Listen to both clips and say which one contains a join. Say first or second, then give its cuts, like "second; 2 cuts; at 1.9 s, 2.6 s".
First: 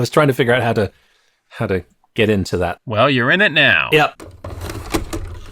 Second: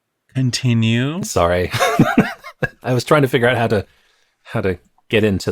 first; 1 cut; at 4.4 s